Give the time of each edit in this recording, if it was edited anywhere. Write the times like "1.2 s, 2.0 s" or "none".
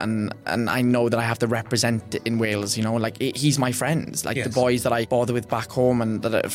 5.1 s